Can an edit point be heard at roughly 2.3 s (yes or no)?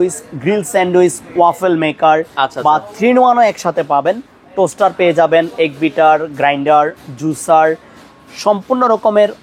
no